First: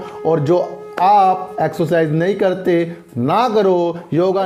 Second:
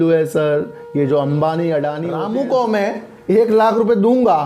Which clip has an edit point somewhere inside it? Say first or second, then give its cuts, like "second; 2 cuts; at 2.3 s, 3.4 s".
second; 1 cut; at 2.1 s